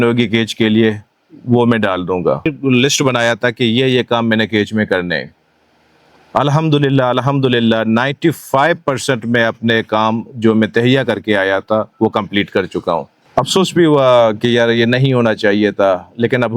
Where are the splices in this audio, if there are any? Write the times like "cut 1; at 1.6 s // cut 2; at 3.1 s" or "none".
cut 1; at 2.5 s // cut 2; at 13.2 s